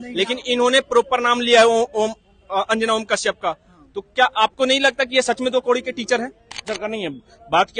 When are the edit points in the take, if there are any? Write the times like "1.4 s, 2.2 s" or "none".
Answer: 6.6 s